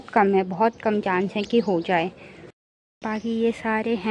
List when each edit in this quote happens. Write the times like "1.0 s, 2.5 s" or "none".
2.5 s